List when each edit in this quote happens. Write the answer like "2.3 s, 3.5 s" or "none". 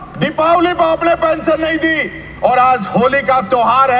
none